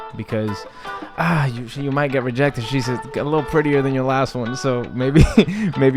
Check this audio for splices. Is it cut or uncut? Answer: uncut